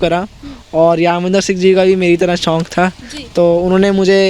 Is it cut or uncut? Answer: uncut